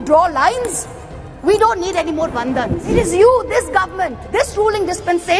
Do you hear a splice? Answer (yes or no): yes